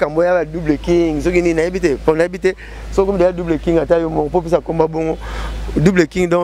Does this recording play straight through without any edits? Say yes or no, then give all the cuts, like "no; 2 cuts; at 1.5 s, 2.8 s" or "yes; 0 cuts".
yes; 0 cuts